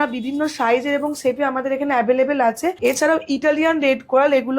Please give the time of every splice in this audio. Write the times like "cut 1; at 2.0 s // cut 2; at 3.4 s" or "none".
cut 1; at 2.8 s